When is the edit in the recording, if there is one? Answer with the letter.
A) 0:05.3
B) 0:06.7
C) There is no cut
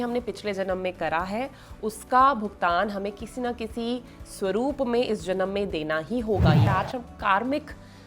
B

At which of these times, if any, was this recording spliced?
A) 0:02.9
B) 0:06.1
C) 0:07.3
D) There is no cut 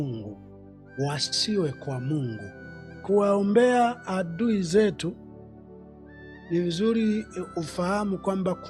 A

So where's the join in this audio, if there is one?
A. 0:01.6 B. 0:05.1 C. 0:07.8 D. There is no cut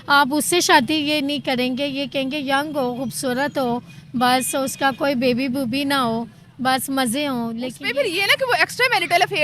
C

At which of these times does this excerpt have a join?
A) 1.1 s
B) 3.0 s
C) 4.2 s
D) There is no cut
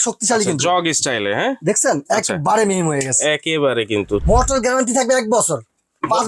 C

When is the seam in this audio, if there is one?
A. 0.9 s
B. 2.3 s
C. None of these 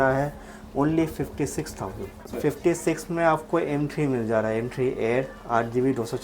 B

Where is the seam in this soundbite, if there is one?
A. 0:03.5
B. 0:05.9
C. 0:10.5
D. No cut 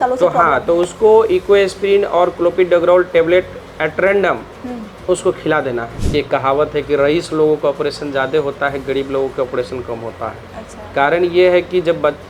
B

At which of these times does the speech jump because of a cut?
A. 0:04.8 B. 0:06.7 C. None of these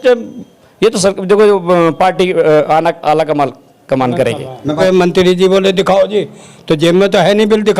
A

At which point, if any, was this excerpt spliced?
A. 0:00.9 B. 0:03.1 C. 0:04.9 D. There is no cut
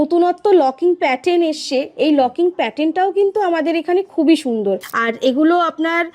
C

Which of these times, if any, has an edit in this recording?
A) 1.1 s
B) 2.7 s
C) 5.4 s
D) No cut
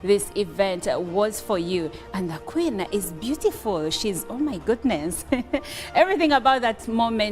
B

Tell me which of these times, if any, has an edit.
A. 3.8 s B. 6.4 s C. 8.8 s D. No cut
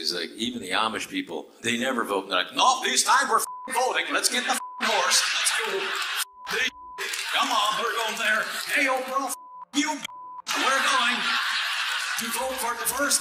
D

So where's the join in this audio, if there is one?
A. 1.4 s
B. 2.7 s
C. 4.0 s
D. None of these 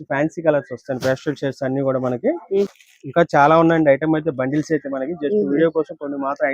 B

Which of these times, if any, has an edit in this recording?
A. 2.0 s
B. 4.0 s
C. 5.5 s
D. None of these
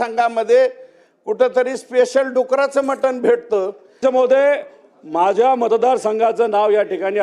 B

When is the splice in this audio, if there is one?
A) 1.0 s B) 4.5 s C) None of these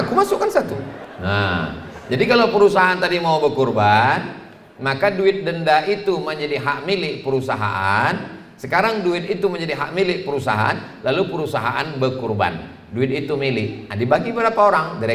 A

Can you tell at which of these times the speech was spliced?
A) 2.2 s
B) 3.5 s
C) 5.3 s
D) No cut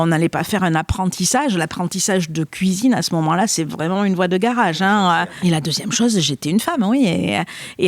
C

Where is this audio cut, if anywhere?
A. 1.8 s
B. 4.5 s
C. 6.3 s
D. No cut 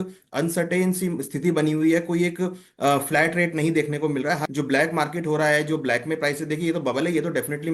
B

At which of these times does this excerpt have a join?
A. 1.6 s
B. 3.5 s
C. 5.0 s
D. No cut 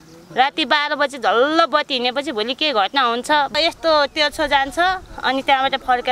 B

